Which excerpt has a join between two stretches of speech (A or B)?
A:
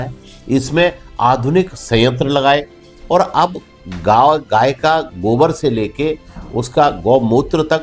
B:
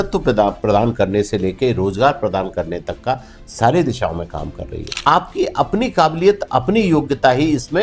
B